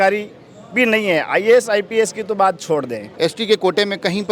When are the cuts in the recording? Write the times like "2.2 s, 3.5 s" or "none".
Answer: 3.1 s